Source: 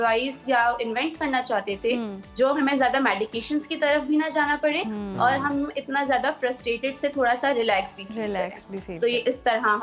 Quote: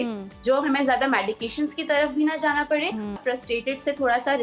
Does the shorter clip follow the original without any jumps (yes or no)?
no